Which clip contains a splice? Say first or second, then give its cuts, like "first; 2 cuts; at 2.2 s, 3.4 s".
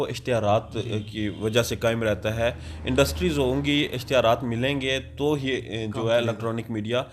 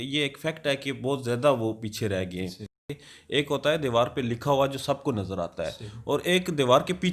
second; 1 cut; at 2.9 s